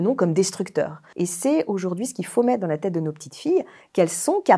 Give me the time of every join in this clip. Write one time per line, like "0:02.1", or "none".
0:01.0